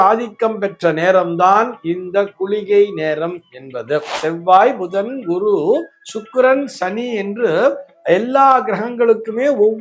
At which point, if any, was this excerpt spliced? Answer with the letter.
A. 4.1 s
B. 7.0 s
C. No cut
A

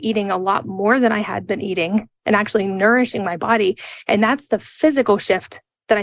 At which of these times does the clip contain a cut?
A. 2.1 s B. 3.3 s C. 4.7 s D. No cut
D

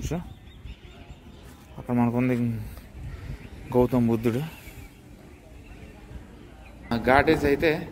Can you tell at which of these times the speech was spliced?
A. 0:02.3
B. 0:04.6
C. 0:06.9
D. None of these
C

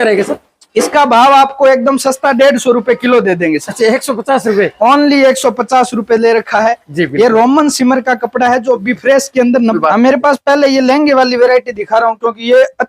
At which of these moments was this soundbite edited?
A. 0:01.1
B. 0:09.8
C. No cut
B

